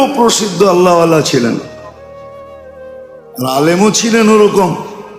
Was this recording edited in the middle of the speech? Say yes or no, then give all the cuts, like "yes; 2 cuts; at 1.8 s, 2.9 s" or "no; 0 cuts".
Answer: yes; 2 cuts; at 1.7 s, 3.3 s